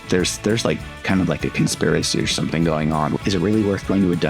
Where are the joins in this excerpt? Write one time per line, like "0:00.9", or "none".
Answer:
0:03.1